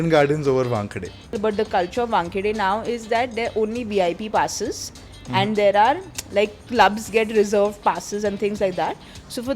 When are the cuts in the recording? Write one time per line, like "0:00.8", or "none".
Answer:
0:01.4